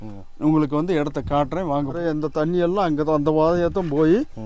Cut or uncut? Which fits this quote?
cut